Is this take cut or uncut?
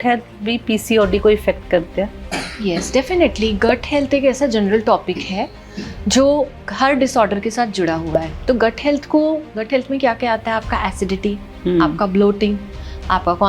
uncut